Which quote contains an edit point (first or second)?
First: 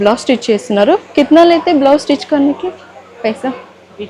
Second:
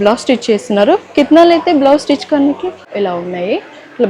second